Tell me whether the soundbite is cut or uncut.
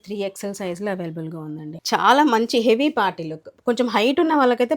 cut